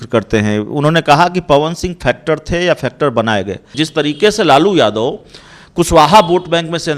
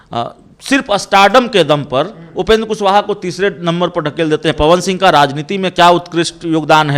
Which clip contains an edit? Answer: first; 1 cut; at 3.7 s

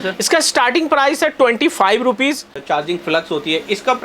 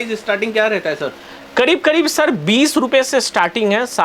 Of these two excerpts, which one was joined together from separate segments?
first; 1 cut; at 2.6 s

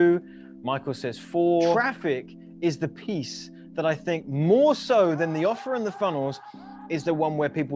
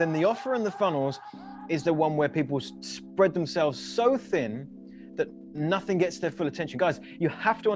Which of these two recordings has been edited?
first; 1 cut; at 1.8 s

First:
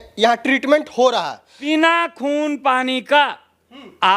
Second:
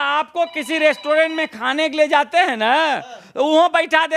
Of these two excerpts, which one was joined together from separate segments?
first; 1 cut; at 1.5 s

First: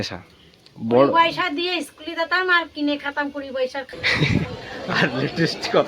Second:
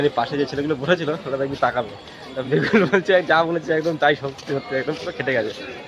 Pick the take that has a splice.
first; 1 cut; at 3.9 s

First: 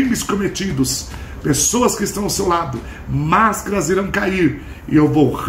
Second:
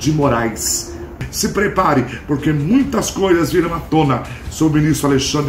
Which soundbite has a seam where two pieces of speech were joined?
second; 1 cut; at 1.1 s

